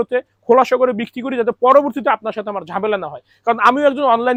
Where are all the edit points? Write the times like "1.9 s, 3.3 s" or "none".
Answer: none